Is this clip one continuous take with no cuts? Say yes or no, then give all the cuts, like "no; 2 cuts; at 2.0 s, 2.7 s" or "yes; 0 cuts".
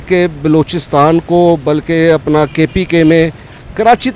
yes; 0 cuts